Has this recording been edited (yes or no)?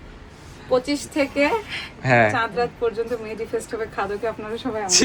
no